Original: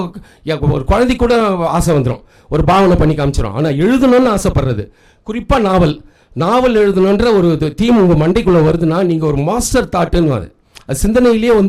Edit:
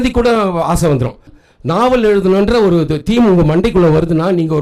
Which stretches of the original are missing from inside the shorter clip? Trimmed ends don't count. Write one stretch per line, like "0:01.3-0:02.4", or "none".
0:02.4-0:06.1